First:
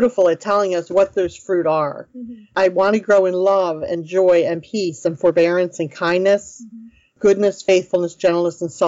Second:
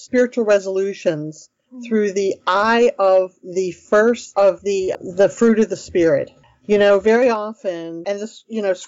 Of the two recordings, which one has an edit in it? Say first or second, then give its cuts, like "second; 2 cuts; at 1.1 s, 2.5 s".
second; 2 cuts; at 5.0 s, 7.9 s